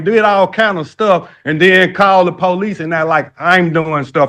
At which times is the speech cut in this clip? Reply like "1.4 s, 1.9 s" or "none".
none